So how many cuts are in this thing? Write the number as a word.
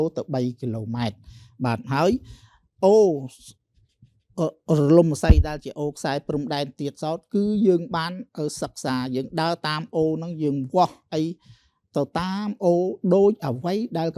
zero